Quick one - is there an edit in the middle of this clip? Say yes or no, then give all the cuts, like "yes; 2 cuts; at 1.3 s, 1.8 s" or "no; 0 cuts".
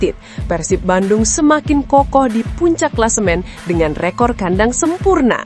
no; 0 cuts